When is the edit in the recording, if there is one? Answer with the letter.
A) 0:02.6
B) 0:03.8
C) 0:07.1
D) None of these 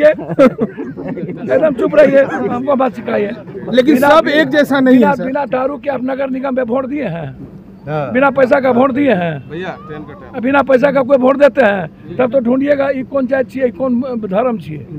A